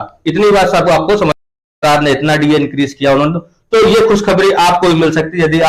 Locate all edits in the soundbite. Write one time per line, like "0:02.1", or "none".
0:01.7